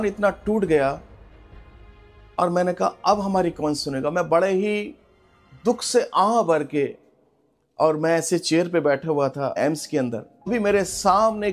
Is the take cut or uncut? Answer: cut